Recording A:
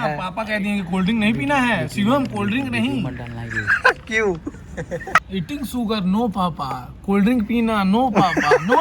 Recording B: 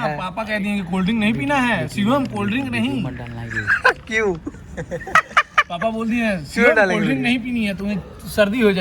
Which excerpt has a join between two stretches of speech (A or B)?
A